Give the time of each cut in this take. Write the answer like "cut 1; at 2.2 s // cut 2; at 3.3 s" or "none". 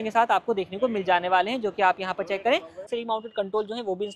cut 1; at 2.9 s